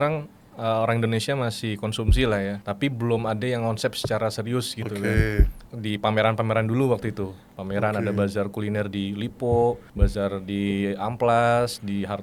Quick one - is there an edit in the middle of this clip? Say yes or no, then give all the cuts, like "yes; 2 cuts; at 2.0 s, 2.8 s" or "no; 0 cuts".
yes; 3 cuts; at 2.6 s, 5.7 s, 9.9 s